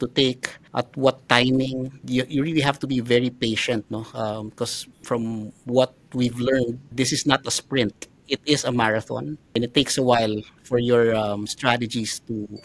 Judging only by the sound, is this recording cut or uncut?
uncut